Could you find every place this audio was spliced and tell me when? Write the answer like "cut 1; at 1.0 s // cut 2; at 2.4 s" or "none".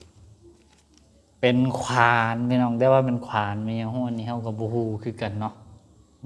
none

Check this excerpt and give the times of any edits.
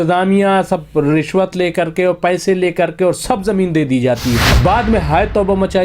cut 1; at 4.5 s

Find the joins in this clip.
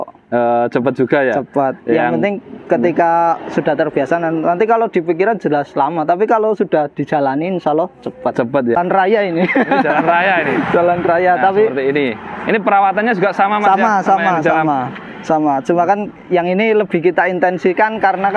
cut 1; at 8.8 s

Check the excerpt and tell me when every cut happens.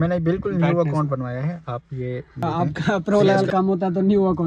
cut 1; at 2.3 s

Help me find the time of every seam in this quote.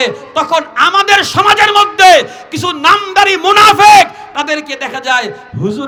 none

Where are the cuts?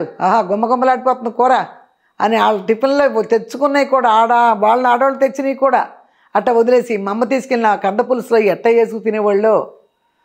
none

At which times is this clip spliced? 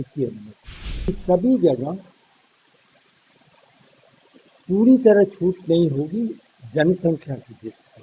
cut 1; at 1.1 s

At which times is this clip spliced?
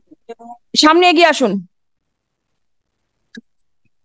none

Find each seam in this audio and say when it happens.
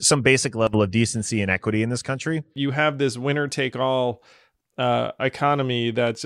cut 1; at 2.5 s

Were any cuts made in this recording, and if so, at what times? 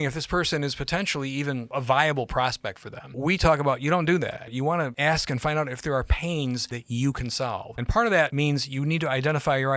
cut 1; at 1.7 s // cut 2; at 3.2 s // cut 3; at 4.6 s // cut 4; at 6.7 s // cut 5; at 7.8 s // cut 6; at 8.3 s

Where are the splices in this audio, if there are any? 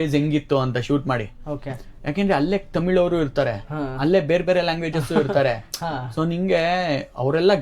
none

